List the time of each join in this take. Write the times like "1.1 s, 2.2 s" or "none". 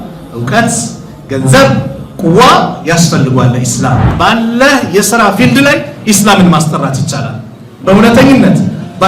4.1 s

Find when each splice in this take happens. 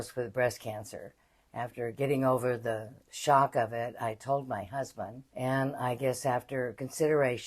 5.2 s

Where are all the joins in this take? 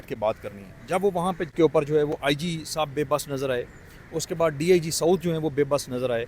1.5 s

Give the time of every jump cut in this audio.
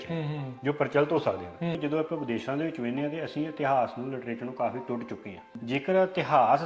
1.8 s, 5.5 s

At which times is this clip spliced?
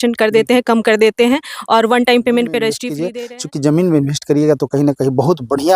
2.9 s

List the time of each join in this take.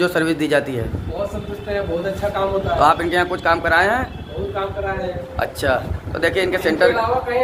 none

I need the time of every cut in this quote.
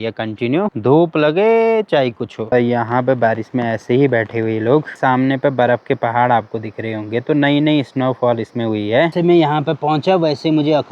2.5 s, 4.9 s, 9.1 s

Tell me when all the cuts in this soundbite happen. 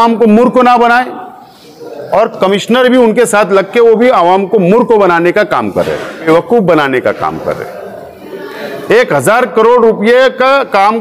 6.3 s

